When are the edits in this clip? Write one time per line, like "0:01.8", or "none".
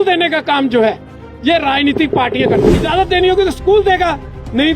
0:02.8